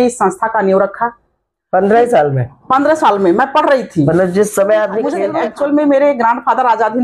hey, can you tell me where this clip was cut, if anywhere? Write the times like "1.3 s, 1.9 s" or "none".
5.3 s

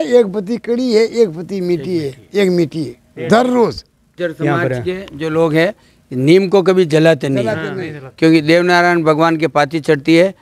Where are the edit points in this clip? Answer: 4.1 s

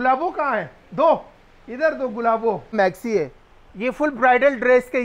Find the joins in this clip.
2.7 s

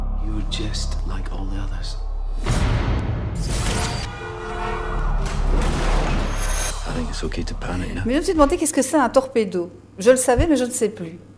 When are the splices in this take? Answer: 8.0 s

